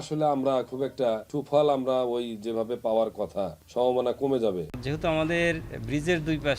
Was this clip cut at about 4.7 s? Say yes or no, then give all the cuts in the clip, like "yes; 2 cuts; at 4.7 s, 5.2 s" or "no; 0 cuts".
yes; 3 cuts; at 1.3 s, 3.6 s, 4.7 s